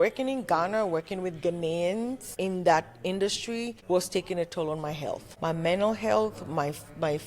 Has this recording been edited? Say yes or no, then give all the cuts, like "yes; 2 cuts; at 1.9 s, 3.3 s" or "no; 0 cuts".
yes; 3 cuts; at 2.2 s, 3.8 s, 5.3 s